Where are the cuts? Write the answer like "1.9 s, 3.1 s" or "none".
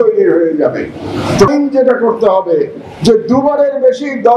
1.5 s